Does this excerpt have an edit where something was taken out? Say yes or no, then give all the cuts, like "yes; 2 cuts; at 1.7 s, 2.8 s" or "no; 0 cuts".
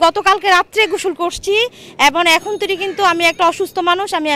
no; 0 cuts